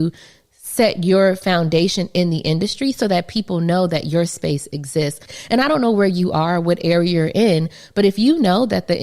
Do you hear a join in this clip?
yes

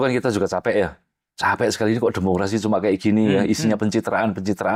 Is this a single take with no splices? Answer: yes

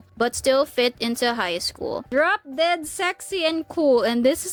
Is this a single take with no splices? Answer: yes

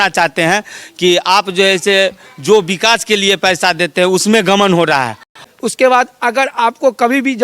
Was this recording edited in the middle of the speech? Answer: yes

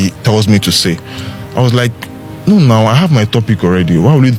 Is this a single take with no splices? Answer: yes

